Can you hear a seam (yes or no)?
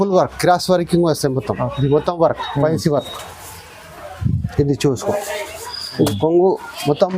yes